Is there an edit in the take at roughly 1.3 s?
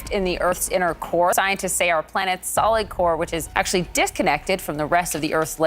yes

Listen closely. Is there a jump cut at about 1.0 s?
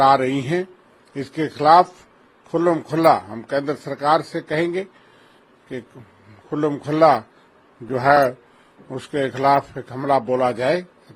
no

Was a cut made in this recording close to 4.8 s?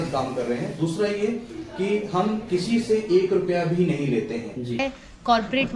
yes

